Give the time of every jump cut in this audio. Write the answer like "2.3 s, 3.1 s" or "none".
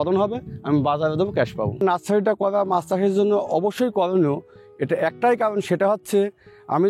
1.8 s